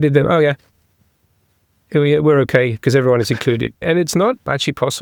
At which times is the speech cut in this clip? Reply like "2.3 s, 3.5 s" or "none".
none